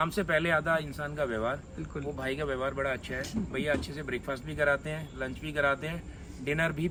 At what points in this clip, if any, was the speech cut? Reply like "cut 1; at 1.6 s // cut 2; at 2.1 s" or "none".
none

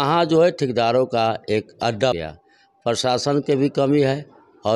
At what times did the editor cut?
cut 1; at 2.1 s

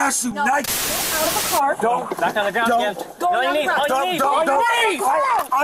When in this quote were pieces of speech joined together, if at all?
cut 1; at 1.1 s

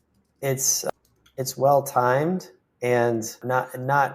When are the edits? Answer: cut 1; at 0.9 s // cut 2; at 3.4 s

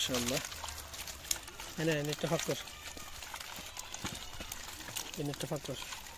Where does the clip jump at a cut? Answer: none

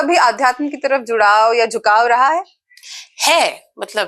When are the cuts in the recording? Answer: none

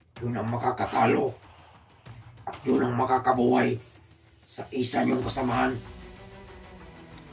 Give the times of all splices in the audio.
cut 1; at 5.9 s

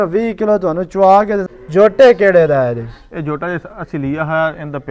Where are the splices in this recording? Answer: cut 1; at 1.5 s

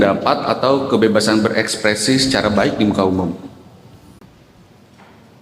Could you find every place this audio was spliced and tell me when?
cut 1; at 4.2 s

